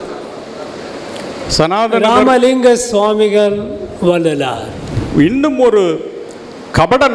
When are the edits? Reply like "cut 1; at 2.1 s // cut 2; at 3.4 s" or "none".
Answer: cut 1; at 5.1 s